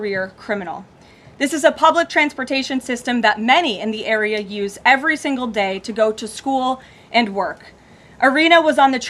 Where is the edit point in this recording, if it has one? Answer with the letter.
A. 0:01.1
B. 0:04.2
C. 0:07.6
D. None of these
D